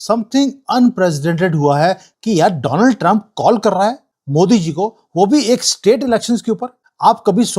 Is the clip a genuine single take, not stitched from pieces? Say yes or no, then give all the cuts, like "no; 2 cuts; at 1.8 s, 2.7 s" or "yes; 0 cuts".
no; 1 cut; at 2.1 s